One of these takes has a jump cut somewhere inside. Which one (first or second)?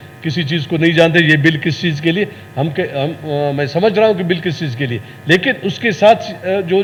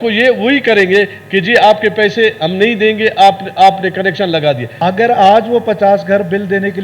second